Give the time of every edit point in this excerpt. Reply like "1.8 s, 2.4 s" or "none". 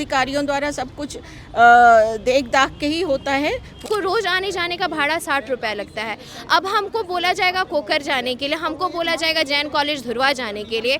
3.8 s